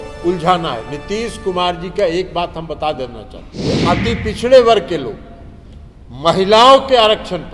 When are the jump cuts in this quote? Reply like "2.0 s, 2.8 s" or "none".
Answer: 3.7 s